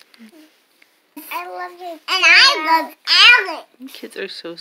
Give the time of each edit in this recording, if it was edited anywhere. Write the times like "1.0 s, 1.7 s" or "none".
1.2 s